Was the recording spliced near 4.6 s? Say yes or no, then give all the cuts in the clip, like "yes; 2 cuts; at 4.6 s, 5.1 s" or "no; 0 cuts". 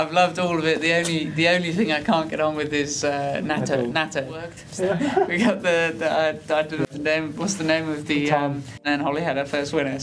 yes; 2 cuts; at 4.6 s, 8.7 s